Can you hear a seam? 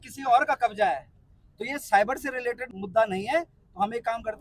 yes; 1 cut; at 2.7 s

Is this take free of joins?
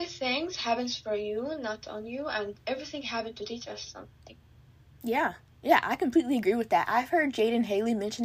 yes; 0 cuts

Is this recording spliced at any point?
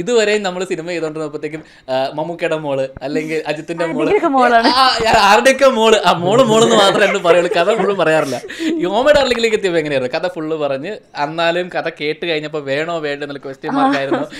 no; 0 cuts

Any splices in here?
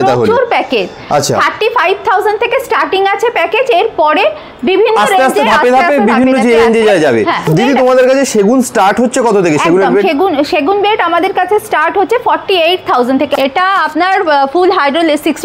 yes; 2 cuts; at 7.5 s, 13.3 s

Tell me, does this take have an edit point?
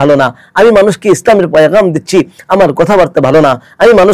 no; 0 cuts

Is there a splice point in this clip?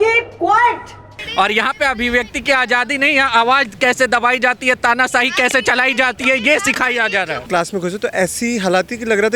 yes; 2 cuts; at 1.2 s, 7.4 s

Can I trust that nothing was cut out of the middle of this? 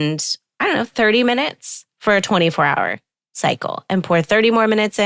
yes; 0 cuts

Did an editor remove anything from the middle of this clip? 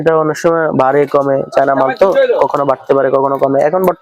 no; 0 cuts

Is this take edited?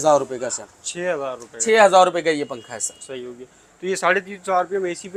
no; 0 cuts

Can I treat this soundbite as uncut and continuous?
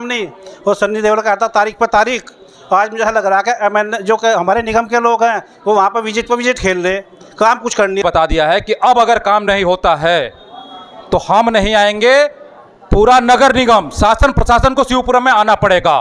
no; 1 cut; at 8.0 s

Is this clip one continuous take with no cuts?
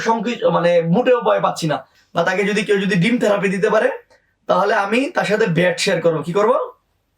no; 1 cut; at 1.9 s

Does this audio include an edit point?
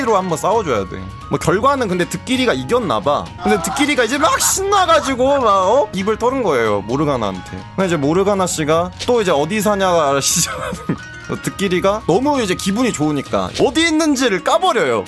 yes; 2 cuts; at 6.0 s, 13.5 s

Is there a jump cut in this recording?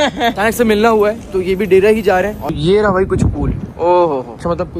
yes; 1 cut; at 2.5 s

